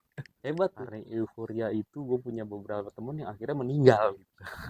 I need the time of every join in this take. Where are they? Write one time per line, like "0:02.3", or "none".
0:01.4